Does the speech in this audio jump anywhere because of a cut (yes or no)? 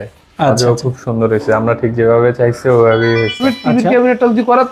yes